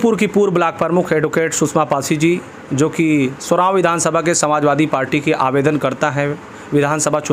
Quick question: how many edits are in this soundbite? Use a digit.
0